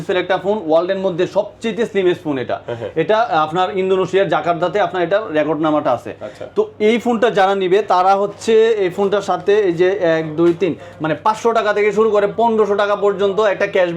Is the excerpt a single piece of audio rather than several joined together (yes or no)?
yes